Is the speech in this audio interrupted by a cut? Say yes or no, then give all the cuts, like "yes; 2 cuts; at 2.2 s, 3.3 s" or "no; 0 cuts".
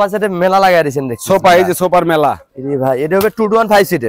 no; 0 cuts